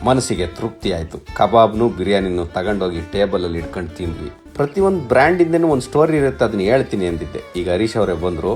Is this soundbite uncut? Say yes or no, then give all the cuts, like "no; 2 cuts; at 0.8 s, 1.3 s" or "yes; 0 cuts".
no; 1 cut; at 4.2 s